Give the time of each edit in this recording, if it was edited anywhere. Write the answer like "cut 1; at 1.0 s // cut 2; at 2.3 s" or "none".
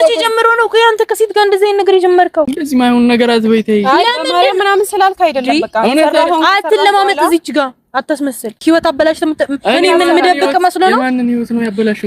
cut 1; at 2.5 s // cut 2; at 8.6 s